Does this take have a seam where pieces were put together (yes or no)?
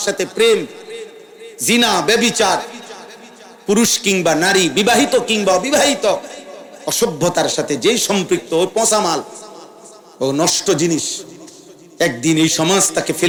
no